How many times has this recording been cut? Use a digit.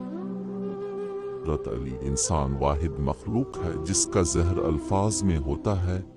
1